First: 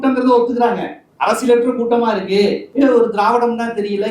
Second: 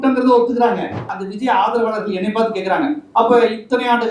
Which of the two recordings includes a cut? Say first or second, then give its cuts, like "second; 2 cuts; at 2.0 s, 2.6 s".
second; 1 cut; at 1.1 s